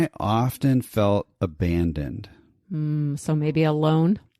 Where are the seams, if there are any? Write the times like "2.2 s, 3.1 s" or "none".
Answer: none